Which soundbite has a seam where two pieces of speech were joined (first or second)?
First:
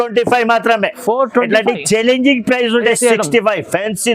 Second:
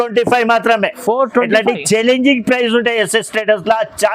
first